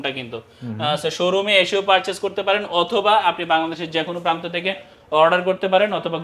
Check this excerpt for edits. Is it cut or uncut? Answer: uncut